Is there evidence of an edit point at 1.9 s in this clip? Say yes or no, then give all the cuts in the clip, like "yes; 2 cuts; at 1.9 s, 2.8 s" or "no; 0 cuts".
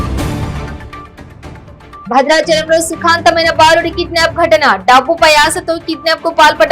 yes; 1 cut; at 1.9 s